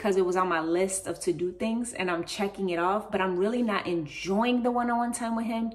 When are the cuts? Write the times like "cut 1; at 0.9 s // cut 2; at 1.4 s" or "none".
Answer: none